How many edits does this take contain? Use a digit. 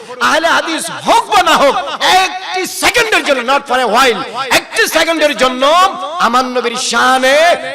1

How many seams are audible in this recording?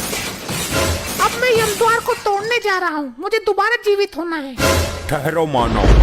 1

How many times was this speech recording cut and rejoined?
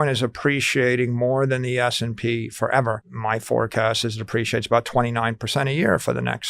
1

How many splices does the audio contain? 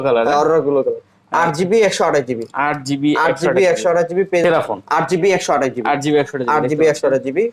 1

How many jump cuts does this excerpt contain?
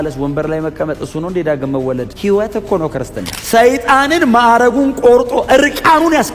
2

